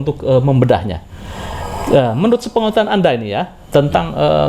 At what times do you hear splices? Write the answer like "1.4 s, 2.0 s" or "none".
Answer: none